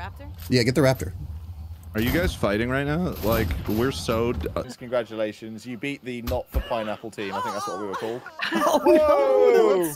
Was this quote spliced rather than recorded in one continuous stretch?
yes; 1 cut; at 4.6 s

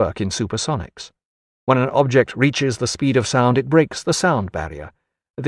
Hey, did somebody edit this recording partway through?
no; 0 cuts

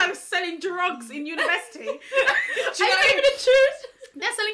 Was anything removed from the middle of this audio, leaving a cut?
no; 0 cuts

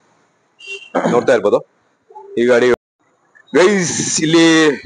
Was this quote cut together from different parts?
yes; 1 cut; at 2.7 s

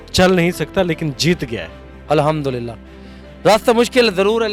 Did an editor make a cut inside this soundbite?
no; 0 cuts

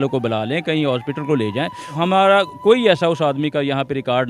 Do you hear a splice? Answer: yes; 1 cut; at 1.8 s

